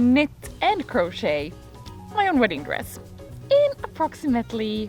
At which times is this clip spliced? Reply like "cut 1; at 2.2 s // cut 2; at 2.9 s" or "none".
none